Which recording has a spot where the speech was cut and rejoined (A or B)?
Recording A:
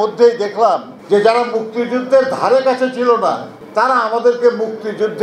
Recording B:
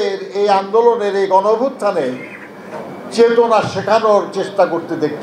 A